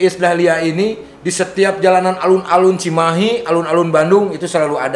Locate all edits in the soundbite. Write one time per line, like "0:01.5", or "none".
none